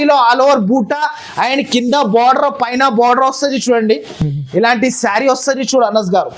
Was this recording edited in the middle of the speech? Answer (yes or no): no